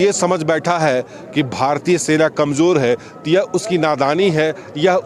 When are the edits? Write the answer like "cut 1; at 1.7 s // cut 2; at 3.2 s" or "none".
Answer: none